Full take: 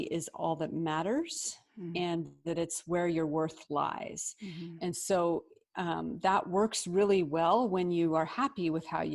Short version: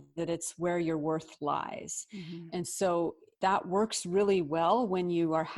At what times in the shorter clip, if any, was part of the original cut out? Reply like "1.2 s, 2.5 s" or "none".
3.3 s

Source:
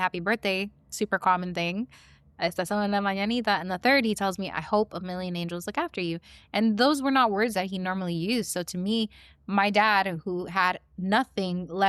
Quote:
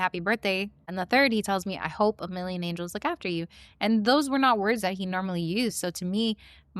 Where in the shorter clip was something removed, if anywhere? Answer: 0.9 s

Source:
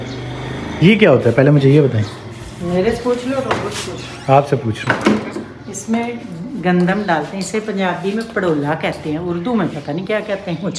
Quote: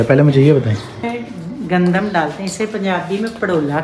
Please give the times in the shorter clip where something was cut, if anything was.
1.1 s

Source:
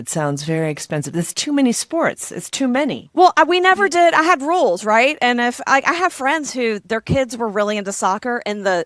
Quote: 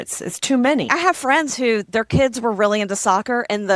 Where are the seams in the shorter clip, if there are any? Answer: 0.9 s

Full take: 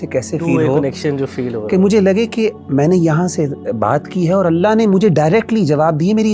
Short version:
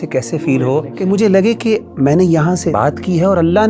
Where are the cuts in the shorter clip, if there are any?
0.9 s, 2.7 s

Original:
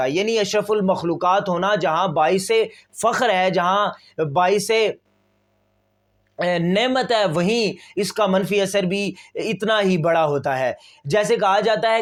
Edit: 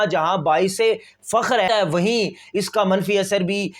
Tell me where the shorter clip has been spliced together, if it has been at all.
1.7 s

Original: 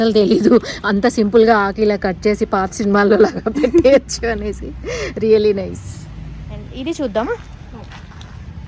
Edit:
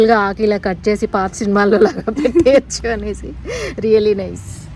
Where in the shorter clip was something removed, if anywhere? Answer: none

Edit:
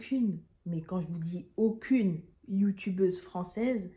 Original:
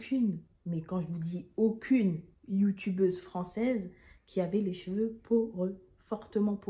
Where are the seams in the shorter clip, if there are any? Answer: none

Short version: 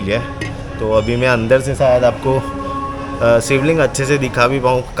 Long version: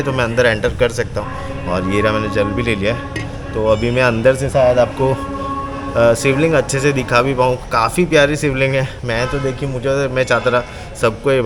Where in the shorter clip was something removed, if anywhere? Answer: none

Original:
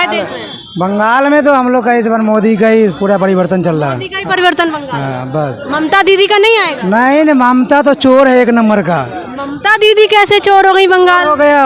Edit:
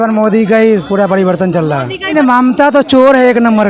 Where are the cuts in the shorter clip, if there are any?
2.1 s

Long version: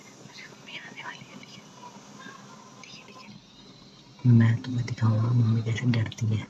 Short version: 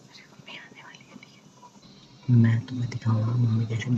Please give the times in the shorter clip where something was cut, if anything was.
1.8 s

